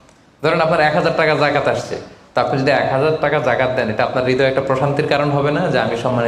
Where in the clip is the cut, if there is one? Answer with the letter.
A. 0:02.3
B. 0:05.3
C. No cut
C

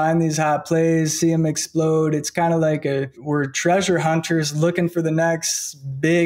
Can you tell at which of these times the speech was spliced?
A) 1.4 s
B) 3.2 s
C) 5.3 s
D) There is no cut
B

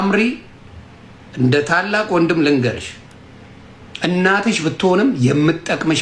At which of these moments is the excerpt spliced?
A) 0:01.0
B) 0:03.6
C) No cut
C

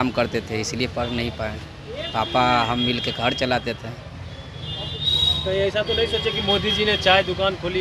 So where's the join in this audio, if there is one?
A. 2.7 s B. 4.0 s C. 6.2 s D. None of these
D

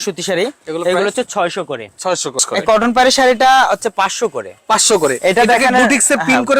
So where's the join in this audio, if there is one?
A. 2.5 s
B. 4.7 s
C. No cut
A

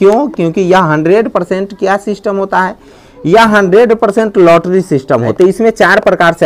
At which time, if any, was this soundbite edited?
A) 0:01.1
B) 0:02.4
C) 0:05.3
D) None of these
C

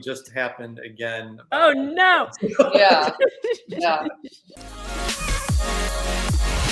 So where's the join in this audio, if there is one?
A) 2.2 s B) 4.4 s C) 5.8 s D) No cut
B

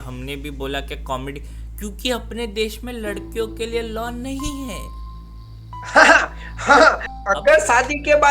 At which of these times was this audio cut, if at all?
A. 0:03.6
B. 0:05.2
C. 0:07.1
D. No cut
C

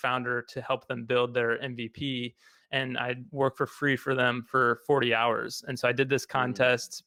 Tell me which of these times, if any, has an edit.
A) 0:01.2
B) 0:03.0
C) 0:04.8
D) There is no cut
D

